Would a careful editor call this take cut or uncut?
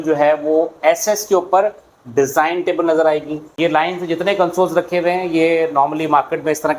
cut